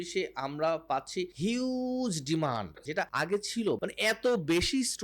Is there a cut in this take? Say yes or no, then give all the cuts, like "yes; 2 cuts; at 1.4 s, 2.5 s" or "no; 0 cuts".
yes; 3 cuts; at 1.3 s, 3.1 s, 3.8 s